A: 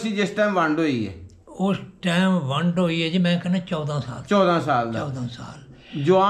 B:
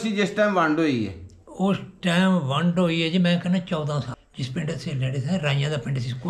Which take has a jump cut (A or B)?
B